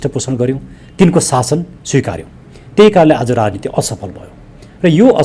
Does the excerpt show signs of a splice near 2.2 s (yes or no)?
no